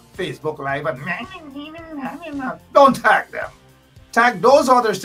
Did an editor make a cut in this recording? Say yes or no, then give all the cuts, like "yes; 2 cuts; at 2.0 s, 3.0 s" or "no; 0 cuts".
no; 0 cuts